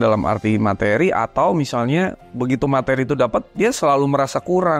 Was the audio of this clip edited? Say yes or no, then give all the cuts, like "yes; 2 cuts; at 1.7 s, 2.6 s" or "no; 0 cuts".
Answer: no; 0 cuts